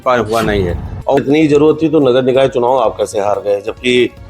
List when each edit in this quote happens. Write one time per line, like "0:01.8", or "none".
0:01.2